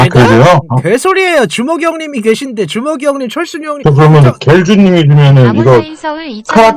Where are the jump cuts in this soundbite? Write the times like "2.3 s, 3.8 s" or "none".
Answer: 3.7 s